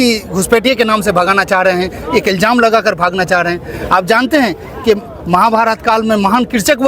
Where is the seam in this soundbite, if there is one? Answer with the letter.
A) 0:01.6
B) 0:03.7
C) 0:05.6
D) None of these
D